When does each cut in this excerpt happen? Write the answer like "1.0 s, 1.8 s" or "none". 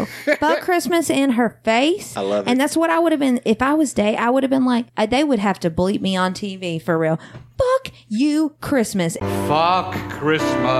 none